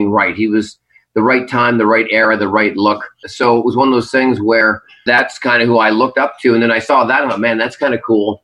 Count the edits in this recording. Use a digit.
2